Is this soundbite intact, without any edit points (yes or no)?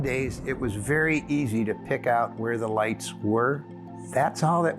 no